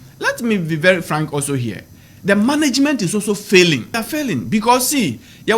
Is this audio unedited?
no; 1 cut; at 4.0 s

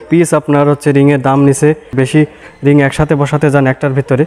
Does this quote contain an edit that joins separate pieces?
yes; 1 cut; at 1.9 s

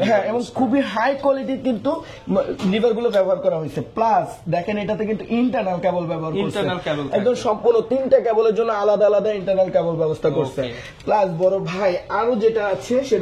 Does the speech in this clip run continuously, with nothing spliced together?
yes; 0 cuts

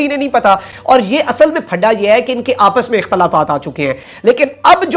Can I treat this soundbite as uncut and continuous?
no; 1 cut; at 4.0 s

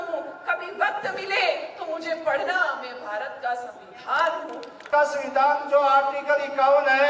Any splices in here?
yes; 1 cut; at 4.9 s

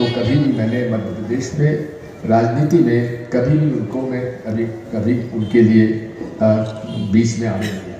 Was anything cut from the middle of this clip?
no; 0 cuts

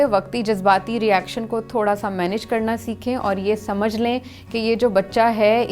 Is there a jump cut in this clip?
no; 0 cuts

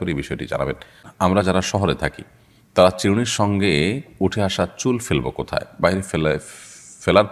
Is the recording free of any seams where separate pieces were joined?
no; 1 cut; at 1.1 s

